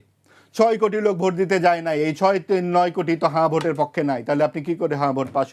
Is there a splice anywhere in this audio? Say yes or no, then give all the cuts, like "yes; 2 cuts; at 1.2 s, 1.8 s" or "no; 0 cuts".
no; 0 cuts